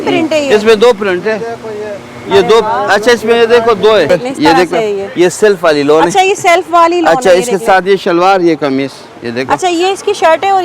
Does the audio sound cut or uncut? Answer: cut